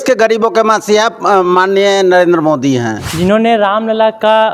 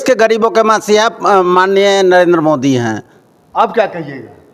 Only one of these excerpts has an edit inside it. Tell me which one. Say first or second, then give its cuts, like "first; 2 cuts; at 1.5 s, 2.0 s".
first; 1 cut; at 3.0 s